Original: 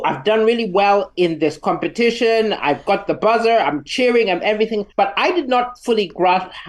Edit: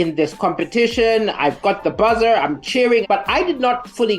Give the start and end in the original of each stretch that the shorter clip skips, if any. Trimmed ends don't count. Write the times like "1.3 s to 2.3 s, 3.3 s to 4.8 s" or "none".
4.3 s to 4.9 s